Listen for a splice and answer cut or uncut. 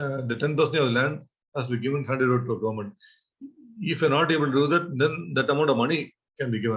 uncut